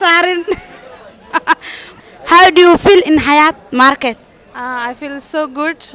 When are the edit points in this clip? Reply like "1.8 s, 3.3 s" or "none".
1.9 s